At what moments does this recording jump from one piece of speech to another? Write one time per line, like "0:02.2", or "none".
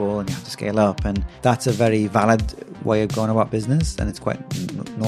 0:01.3